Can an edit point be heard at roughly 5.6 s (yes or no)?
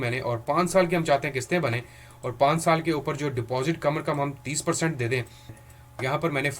yes